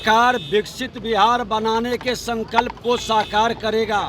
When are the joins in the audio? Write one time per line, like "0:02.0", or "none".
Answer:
none